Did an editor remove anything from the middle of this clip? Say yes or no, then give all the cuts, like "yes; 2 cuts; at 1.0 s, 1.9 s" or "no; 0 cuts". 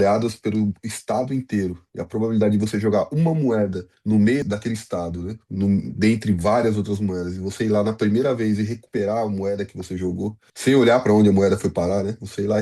yes; 3 cuts; at 3.9 s, 4.4 s, 10.5 s